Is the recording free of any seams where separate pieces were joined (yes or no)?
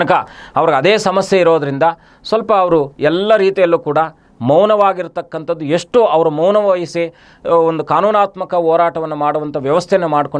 yes